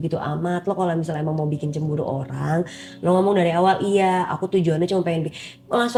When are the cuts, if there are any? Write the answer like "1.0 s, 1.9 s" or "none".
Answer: none